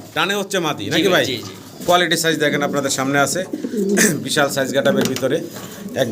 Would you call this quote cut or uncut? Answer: uncut